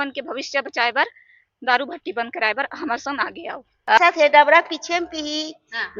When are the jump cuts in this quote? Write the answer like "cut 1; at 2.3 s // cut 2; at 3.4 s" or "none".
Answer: cut 1; at 4.0 s